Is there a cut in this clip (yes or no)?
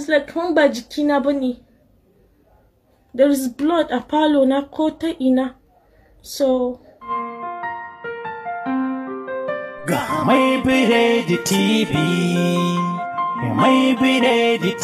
yes